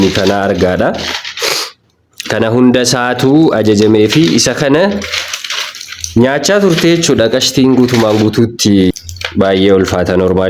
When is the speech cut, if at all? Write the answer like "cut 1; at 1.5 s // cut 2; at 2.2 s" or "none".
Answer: cut 1; at 8.9 s